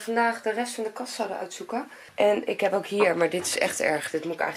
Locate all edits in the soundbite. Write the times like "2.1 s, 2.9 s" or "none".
2.0 s